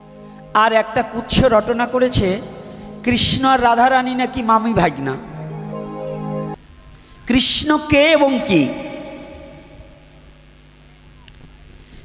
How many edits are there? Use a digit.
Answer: 1